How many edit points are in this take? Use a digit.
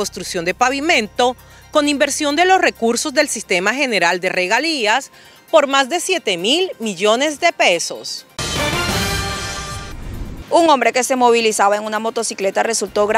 2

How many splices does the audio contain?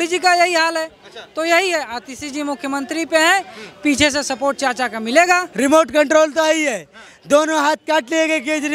1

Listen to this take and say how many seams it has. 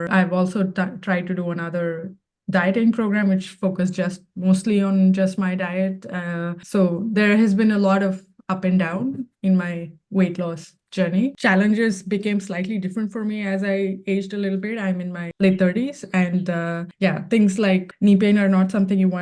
5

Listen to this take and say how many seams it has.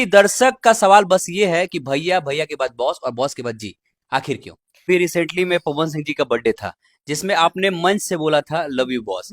1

